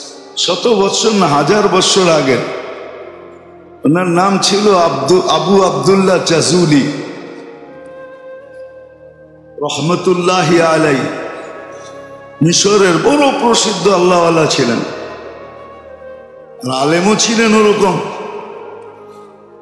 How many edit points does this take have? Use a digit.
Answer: 2